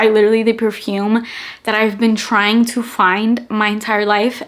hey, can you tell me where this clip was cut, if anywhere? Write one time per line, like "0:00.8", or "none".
none